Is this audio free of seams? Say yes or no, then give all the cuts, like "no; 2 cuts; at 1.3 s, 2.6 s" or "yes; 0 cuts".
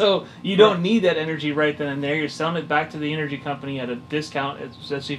yes; 0 cuts